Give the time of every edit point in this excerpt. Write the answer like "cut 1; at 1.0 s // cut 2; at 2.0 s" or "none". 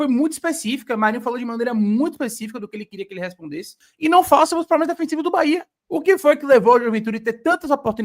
cut 1; at 3.8 s // cut 2; at 5.8 s